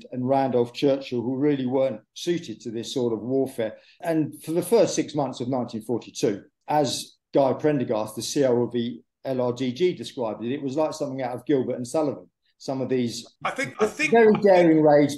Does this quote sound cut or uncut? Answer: cut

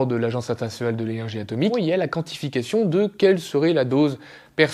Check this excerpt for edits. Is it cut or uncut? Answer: cut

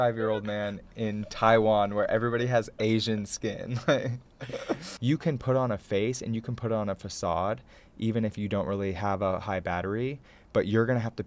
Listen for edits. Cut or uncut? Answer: cut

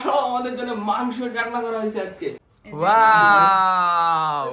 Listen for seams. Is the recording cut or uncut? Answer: cut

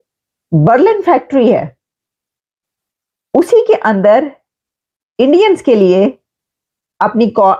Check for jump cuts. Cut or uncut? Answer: uncut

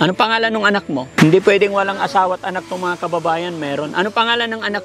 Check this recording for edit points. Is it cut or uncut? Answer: cut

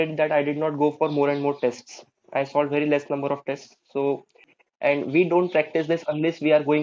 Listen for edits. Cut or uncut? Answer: cut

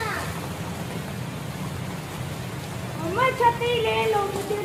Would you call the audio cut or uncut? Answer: uncut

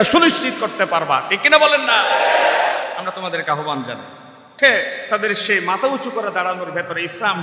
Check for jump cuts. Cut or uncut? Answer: cut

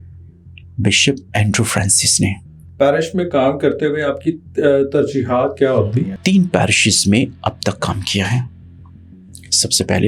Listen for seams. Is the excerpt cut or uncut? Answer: cut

